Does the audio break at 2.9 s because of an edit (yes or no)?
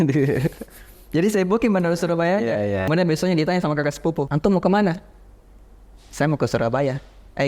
yes